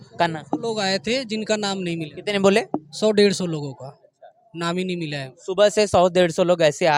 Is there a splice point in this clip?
no; 0 cuts

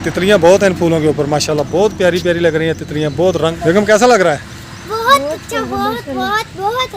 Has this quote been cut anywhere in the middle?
yes; 1 cut; at 3.6 s

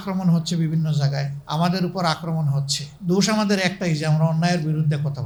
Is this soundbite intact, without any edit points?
yes; 0 cuts

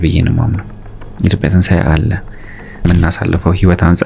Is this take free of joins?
no; 1 cut; at 2.8 s

